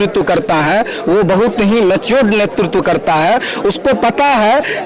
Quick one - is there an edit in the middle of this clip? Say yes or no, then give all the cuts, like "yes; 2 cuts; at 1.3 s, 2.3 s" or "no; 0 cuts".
no; 0 cuts